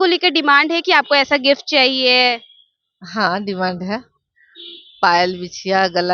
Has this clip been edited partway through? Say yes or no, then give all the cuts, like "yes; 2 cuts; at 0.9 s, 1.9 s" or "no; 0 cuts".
no; 0 cuts